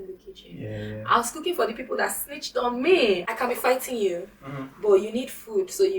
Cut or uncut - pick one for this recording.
cut